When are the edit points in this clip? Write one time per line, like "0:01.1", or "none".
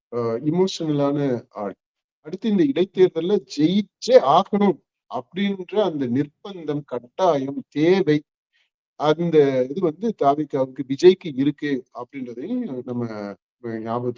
0:02.4